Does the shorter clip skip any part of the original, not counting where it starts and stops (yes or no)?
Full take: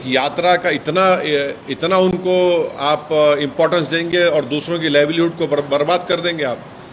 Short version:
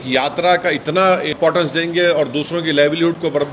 yes